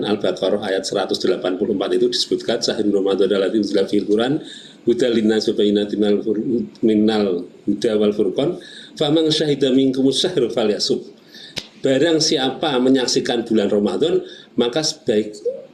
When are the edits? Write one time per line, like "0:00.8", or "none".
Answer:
none